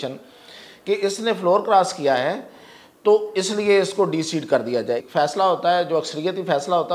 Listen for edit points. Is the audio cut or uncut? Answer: cut